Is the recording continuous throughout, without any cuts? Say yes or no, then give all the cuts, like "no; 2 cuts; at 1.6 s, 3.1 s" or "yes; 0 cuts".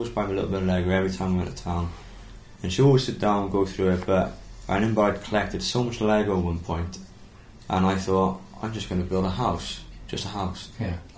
yes; 0 cuts